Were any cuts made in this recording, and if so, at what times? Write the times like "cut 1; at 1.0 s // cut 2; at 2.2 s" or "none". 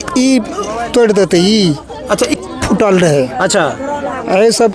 cut 1; at 2.3 s